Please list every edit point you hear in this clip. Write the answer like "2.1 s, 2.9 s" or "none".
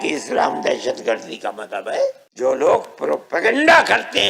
2.2 s